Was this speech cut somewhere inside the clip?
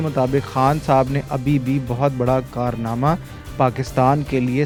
no; 0 cuts

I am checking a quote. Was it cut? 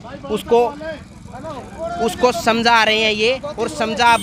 no; 0 cuts

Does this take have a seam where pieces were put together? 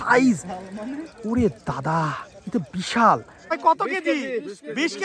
yes; 1 cut; at 3.6 s

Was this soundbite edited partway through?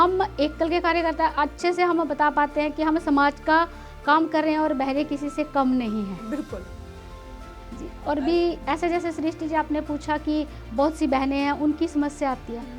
no; 0 cuts

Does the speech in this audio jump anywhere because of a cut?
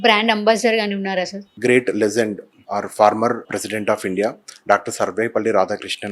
yes; 3 cuts; at 1.4 s, 2.5 s, 3.5 s

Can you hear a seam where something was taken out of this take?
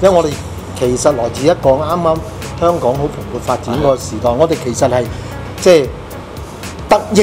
no; 0 cuts

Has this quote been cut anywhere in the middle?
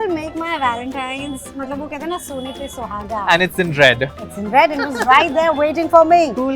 no; 0 cuts

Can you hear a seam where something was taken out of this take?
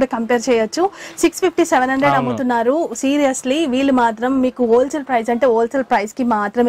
no; 0 cuts

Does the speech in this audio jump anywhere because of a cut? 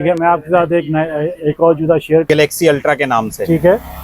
yes; 1 cut; at 2.2 s

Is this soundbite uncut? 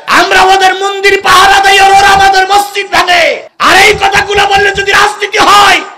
yes; 0 cuts

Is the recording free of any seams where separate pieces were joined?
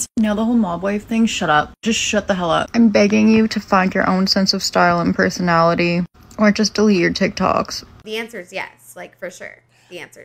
no; 2 cuts; at 2.7 s, 8.0 s

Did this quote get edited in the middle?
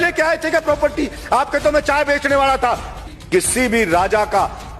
yes; 1 cut; at 3.1 s

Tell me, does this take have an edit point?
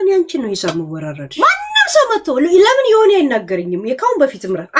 yes; 1 cut; at 1.2 s

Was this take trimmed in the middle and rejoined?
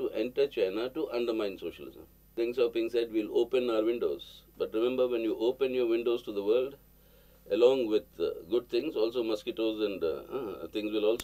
yes; 1 cut; at 2.3 s

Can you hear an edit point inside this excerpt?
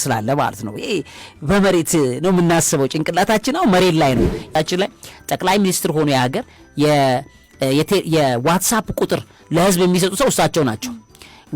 yes; 1 cut; at 4.5 s

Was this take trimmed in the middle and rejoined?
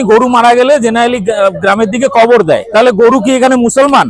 yes; 1 cut; at 2.7 s

